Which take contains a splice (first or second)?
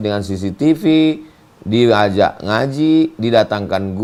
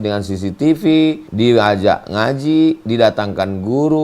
second